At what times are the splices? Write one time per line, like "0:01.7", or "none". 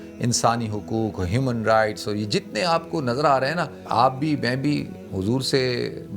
0:03.8